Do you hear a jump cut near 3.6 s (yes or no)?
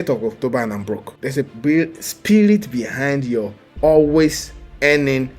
no